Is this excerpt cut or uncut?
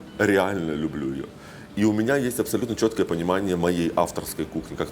uncut